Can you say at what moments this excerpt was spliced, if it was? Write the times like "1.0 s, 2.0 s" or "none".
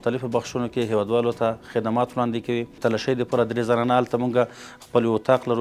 2.8 s